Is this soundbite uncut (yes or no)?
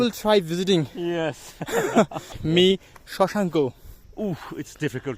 no